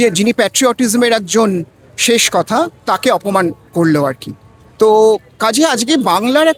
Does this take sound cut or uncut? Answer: uncut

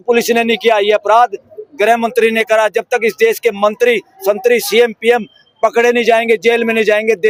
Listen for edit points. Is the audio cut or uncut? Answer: uncut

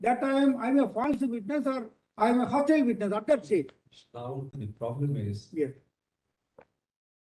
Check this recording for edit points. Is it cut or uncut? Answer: uncut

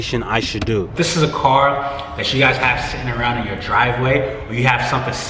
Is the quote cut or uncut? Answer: cut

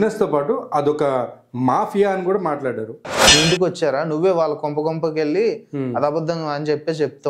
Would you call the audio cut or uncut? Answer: cut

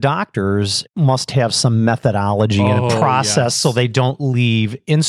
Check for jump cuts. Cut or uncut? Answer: cut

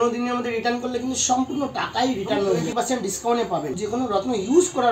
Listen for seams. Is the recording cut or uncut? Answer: cut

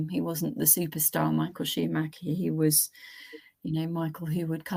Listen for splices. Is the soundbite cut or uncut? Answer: uncut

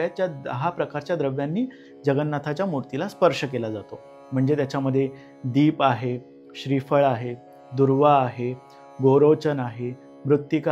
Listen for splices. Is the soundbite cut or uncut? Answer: uncut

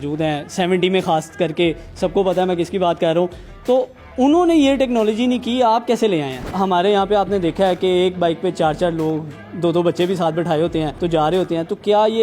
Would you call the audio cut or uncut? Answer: cut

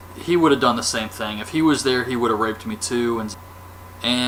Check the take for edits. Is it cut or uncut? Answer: uncut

